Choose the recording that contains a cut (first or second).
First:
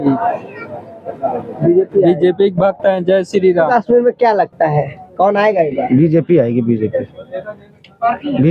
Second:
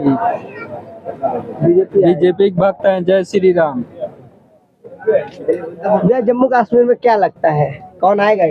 first